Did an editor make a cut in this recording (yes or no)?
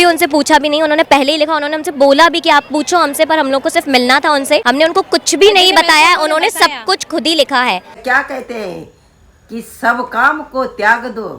yes